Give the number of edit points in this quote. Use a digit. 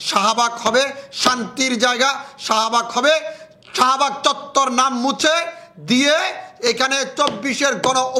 0